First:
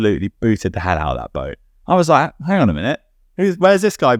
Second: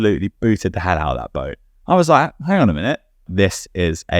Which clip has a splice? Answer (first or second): second